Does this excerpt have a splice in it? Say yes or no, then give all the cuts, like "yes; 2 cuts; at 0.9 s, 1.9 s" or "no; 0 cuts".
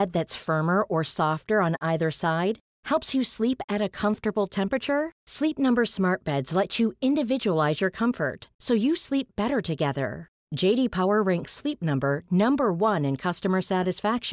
no; 0 cuts